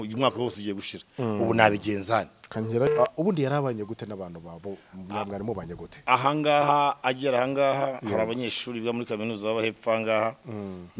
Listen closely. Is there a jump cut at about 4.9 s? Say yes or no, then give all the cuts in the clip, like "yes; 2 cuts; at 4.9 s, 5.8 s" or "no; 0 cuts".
no; 1 cut; at 2.9 s